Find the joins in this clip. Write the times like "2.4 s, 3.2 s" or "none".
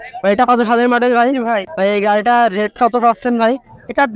1.7 s